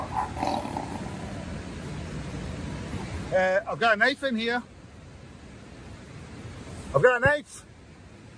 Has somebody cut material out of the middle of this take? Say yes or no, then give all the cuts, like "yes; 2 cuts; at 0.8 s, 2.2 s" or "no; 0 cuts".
yes; 1 cut; at 2.9 s